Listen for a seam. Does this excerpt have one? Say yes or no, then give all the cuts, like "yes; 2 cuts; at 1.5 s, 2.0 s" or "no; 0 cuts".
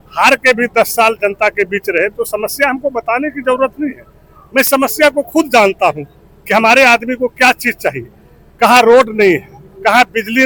no; 0 cuts